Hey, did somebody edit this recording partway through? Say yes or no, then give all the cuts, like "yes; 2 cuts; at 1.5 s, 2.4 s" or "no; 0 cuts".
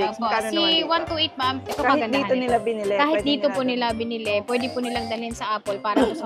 yes; 1 cut; at 1.6 s